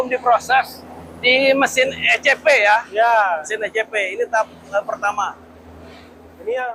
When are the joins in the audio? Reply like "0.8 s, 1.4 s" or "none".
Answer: none